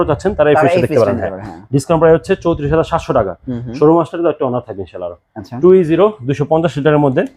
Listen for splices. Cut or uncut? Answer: uncut